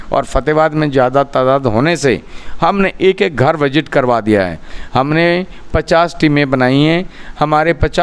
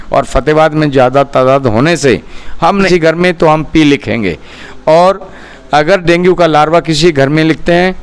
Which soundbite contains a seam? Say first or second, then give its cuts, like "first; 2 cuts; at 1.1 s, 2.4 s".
second; 1 cut; at 2.9 s